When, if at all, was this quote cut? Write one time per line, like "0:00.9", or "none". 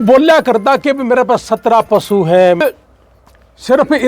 0:02.6

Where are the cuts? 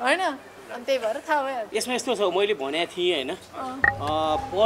0:01.7

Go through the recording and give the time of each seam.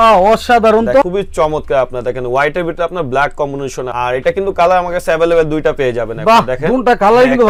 none

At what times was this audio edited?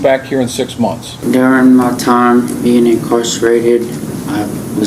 0:01.2

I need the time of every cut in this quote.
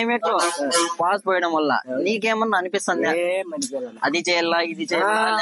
none

